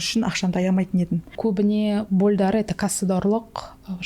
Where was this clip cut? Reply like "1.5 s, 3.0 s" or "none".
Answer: 1.3 s